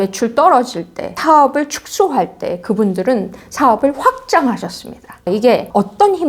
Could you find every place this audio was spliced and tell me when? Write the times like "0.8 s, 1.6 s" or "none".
1.2 s